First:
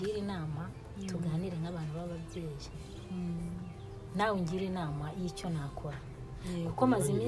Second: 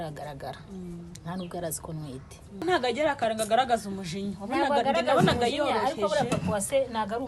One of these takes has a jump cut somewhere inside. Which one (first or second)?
second